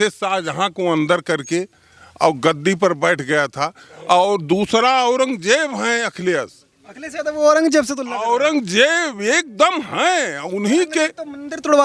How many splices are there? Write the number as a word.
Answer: zero